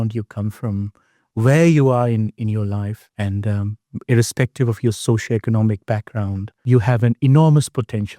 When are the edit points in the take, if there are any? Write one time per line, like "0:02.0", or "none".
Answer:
0:03.0
0:06.6